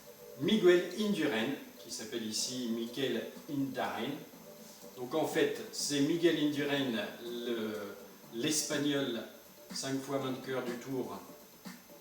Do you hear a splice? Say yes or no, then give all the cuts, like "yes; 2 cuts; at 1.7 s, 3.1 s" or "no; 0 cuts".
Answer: yes; 1 cut; at 2.8 s